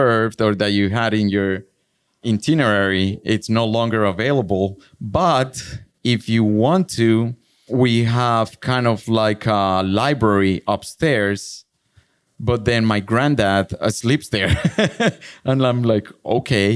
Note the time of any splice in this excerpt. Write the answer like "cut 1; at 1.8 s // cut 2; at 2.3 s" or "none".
none